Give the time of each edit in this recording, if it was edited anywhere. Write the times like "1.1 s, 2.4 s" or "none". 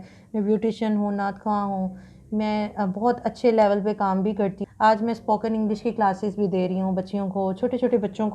4.6 s